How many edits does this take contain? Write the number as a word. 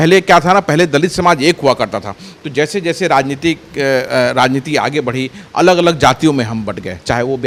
zero